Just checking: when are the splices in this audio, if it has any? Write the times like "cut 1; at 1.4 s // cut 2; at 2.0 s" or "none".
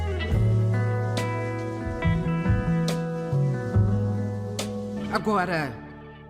cut 1; at 5.1 s